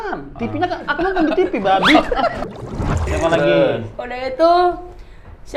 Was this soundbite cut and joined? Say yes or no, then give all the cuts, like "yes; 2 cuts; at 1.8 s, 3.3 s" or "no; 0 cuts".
yes; 1 cut; at 2.6 s